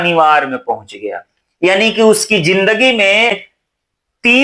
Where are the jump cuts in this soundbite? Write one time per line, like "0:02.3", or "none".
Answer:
0:03.4